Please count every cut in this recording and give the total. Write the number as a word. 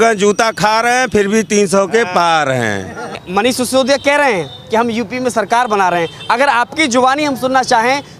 one